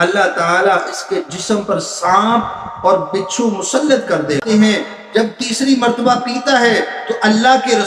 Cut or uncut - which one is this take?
cut